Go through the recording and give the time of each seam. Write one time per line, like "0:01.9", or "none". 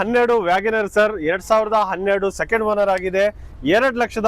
none

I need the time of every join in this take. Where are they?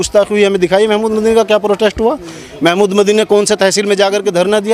none

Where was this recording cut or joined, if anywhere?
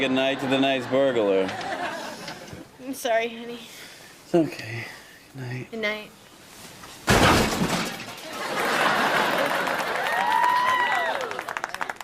0:03.2

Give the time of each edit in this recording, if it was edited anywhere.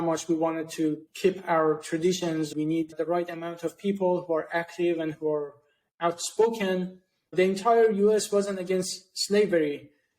0:01.1
0:02.5
0:07.3

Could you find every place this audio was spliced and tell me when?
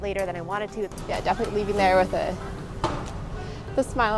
0:00.9

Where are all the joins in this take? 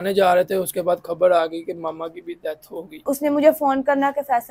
0:03.0

